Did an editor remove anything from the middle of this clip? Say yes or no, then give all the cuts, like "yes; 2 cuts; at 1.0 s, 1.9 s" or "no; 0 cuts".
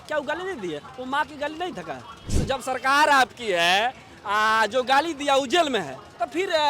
yes; 1 cut; at 2.3 s